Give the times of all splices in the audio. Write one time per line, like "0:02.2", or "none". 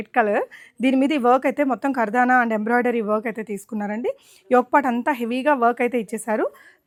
none